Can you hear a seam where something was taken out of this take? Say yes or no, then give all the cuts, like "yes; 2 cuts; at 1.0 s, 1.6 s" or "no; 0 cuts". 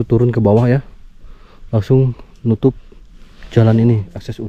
no; 0 cuts